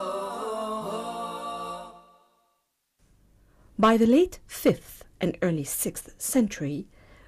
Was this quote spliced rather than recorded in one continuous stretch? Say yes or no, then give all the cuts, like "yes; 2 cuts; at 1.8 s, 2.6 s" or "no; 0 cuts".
yes; 1 cut; at 2.4 s